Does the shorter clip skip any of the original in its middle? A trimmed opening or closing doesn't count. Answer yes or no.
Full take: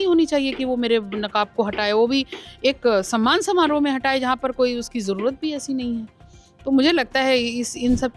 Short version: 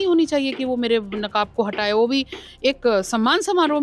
no